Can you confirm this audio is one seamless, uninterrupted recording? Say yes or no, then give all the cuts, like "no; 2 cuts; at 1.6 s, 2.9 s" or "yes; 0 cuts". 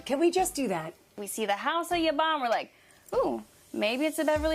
no; 1 cut; at 1.2 s